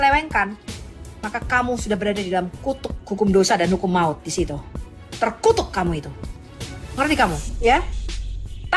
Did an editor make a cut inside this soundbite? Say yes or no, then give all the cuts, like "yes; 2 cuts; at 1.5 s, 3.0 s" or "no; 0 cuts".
no; 0 cuts